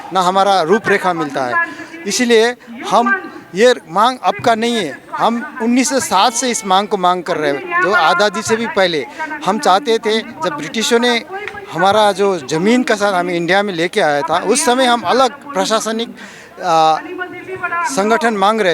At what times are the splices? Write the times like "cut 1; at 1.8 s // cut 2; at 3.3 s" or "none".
none